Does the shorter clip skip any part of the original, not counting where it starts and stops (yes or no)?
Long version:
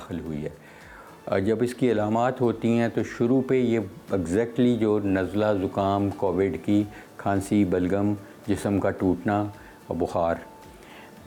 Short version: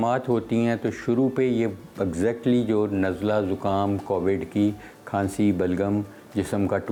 no